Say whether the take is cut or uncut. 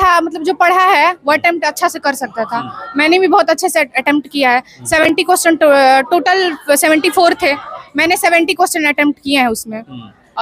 uncut